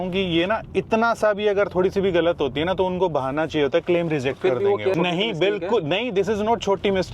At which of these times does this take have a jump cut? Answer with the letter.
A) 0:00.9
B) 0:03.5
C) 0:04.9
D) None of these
C